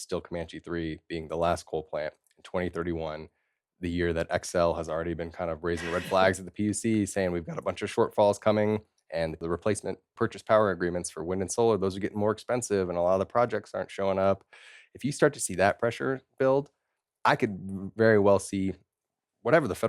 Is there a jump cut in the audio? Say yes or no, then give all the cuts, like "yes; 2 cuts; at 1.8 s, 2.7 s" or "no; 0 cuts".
yes; 2 cuts; at 7.9 s, 9.5 s